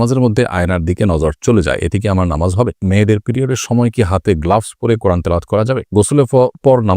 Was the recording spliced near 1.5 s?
no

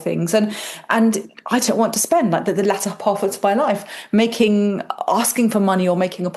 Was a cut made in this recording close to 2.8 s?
no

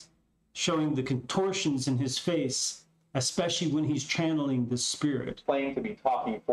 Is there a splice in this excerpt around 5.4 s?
yes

